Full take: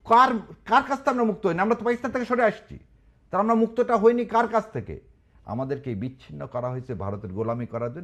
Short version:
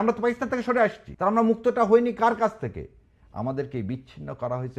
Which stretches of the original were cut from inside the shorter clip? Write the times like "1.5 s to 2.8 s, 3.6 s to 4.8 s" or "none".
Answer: 2.7 s to 3.2 s